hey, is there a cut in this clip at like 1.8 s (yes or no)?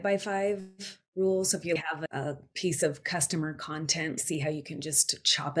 yes